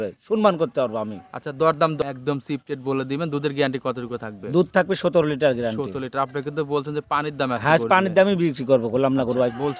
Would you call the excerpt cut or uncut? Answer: cut